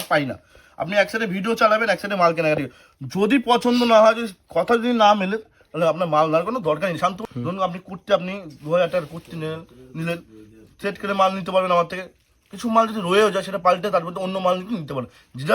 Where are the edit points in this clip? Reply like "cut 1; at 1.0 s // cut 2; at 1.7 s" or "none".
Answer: cut 1; at 7.2 s